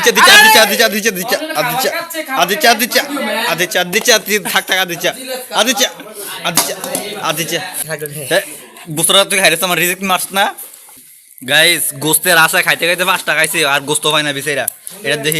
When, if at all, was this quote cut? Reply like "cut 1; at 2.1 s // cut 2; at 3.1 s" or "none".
cut 1; at 7.8 s // cut 2; at 11.0 s